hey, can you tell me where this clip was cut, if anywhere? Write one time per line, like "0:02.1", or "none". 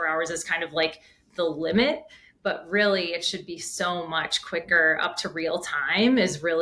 none